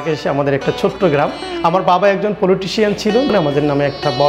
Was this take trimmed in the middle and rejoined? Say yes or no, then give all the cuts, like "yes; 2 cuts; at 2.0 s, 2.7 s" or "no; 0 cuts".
yes; 1 cut; at 3.3 s